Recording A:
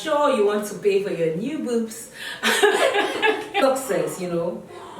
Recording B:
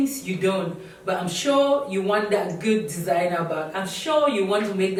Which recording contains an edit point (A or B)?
A